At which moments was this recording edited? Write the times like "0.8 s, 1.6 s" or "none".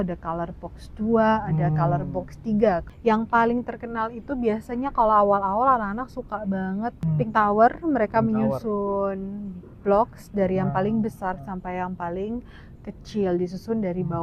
2.9 s, 7.0 s